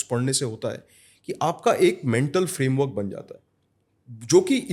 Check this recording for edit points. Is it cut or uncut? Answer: uncut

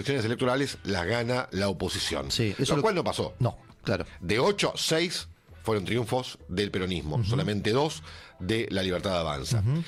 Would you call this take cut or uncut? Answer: uncut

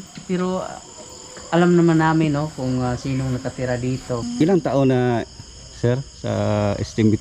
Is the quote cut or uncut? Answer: cut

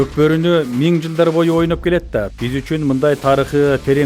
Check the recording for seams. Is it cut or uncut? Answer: cut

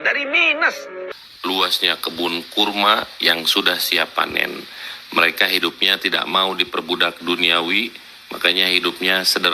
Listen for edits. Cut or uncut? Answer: cut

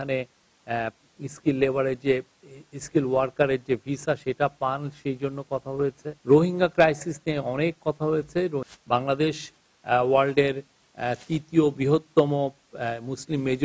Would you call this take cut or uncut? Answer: cut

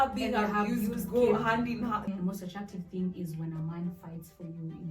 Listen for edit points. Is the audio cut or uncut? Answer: cut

